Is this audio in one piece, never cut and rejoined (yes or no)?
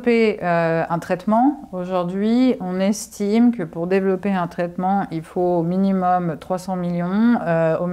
yes